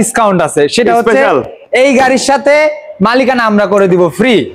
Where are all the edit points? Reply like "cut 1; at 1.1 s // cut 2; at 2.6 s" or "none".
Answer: none